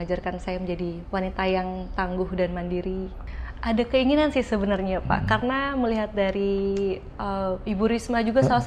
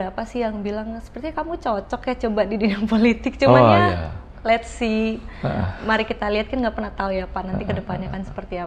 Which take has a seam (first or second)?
first